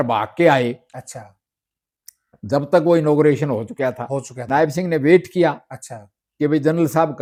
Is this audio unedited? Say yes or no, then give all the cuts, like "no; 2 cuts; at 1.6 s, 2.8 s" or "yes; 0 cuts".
yes; 0 cuts